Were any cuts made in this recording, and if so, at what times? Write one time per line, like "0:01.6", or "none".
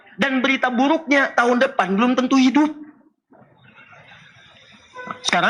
none